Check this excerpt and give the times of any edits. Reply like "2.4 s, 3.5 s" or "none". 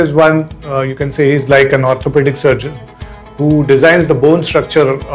none

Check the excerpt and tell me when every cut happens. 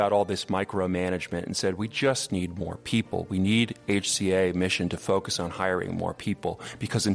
none

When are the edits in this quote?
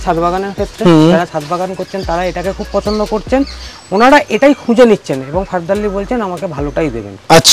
none

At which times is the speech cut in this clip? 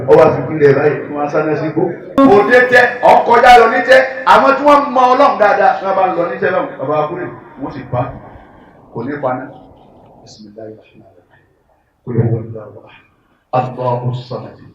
2.2 s

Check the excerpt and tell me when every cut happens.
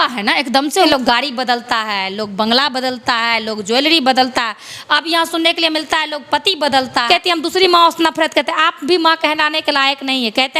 0.9 s, 7.0 s

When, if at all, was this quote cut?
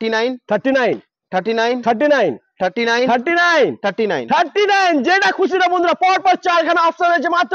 none

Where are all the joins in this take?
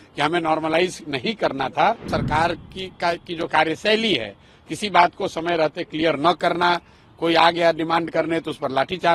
2.1 s

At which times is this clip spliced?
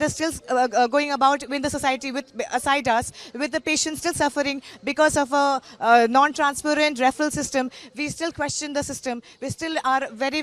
none

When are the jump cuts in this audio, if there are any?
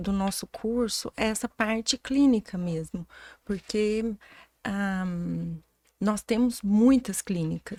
none

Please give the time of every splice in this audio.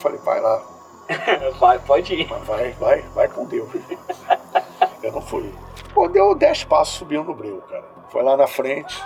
none

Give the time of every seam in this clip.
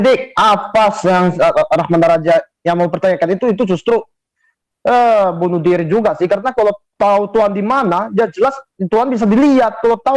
none

